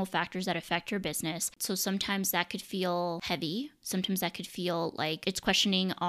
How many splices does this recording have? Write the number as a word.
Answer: three